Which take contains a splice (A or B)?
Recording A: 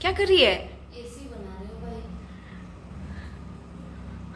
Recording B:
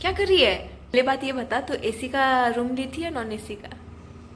B